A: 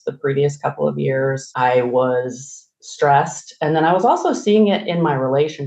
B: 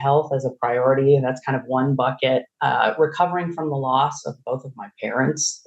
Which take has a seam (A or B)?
A